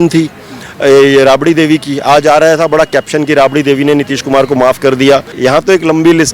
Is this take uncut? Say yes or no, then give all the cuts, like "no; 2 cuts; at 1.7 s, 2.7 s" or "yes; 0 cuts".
no; 1 cut; at 5.3 s